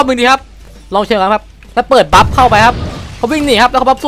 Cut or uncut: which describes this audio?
uncut